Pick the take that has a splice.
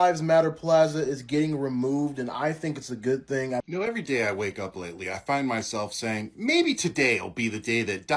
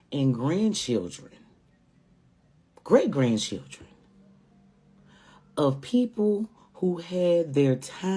first; 1 cut; at 3.7 s

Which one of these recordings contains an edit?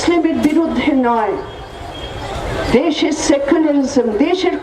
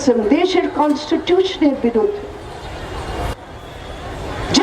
second; 1 cut; at 3.3 s

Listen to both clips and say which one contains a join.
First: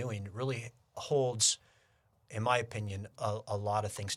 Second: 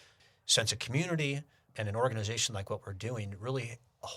second; 1 cut; at 1.6 s

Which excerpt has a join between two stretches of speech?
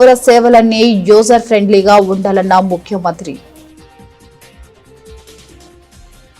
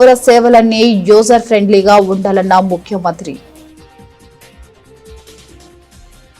second; 1 cut; at 3.4 s

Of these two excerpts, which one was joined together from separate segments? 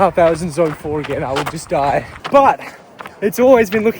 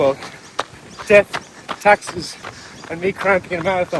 first; 1 cut; at 2.2 s

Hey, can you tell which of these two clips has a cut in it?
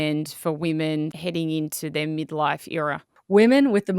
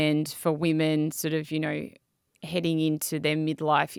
first; 2 cuts; at 1.2 s, 3.1 s

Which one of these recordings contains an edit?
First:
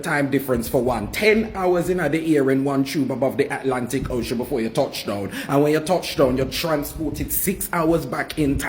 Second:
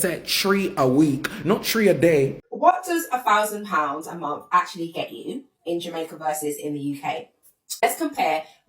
second; 1 cut; at 2.4 s

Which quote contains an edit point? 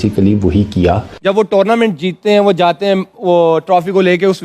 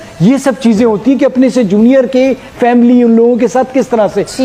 first; 1 cut; at 1.1 s

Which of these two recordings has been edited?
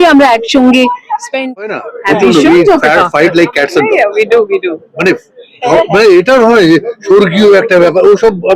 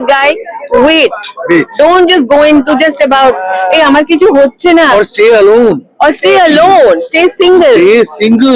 first; 1 cut; at 1.6 s

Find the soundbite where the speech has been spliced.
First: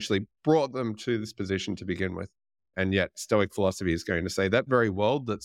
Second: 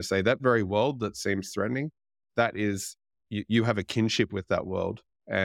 first; 1 cut; at 2.7 s

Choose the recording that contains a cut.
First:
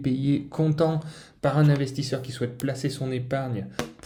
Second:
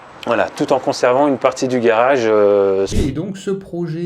second; 1 cut; at 2.9 s

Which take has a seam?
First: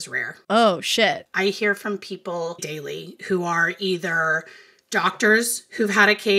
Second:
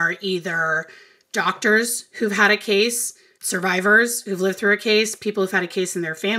first; 2 cuts; at 1.3 s, 2.7 s

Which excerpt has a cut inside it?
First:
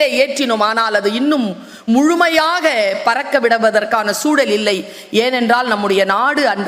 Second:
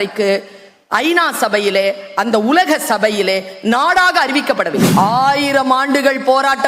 second; 1 cut; at 4.9 s

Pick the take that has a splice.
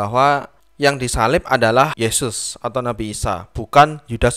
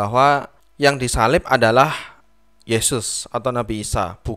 first; 1 cut; at 1.9 s

